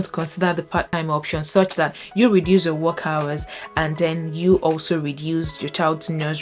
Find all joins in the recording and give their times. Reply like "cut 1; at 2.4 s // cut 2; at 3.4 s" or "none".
cut 1; at 0.9 s